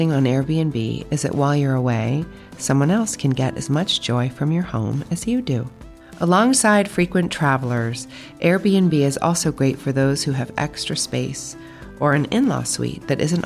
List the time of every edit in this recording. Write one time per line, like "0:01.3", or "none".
none